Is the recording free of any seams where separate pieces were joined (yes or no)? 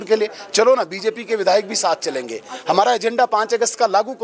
yes